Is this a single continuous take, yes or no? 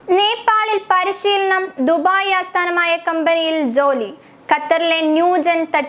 yes